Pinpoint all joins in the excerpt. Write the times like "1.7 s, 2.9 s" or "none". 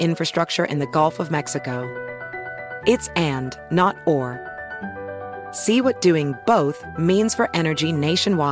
none